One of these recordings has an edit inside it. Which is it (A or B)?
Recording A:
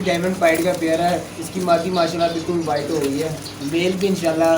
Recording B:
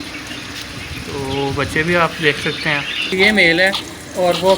B